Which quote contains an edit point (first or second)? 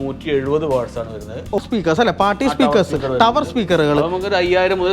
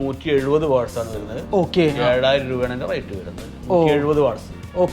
first